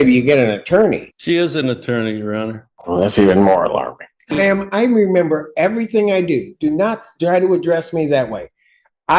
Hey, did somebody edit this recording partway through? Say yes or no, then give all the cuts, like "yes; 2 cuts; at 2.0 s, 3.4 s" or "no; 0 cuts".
yes; 3 cuts; at 1.1 s, 2.7 s, 4.4 s